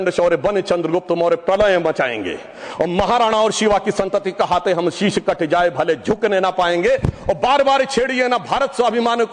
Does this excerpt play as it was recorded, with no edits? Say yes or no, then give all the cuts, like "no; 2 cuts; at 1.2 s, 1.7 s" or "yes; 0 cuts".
yes; 0 cuts